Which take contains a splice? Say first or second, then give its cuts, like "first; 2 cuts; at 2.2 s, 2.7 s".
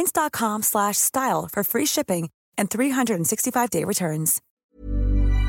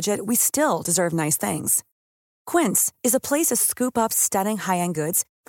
first; 1 cut; at 4.4 s